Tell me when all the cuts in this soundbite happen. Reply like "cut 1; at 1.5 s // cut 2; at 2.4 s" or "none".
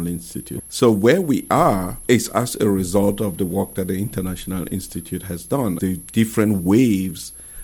cut 1; at 1.9 s // cut 2; at 5.8 s